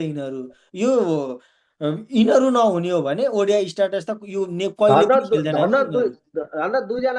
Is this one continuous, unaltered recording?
yes; 0 cuts

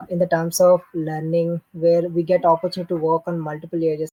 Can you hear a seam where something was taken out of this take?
no; 0 cuts

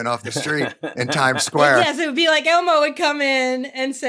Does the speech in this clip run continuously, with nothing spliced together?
no; 1 cut; at 1.8 s

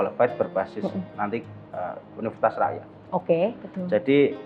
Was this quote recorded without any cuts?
yes; 0 cuts

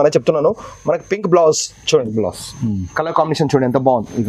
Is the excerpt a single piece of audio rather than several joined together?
yes; 0 cuts

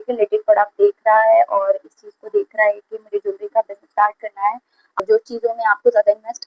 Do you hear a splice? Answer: yes; 1 cut; at 5.0 s

